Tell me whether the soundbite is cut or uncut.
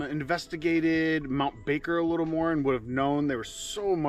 uncut